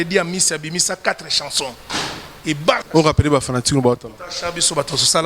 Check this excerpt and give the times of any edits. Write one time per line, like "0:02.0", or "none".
0:02.8